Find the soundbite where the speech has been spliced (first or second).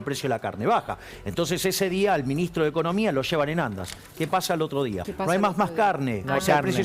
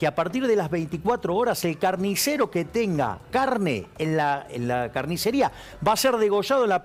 first